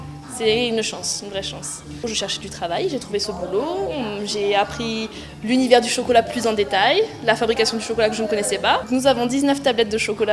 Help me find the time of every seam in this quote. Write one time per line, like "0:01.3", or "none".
0:01.5

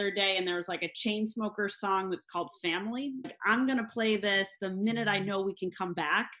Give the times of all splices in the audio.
0:03.4

